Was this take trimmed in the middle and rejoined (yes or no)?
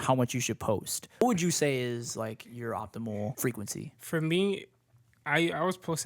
yes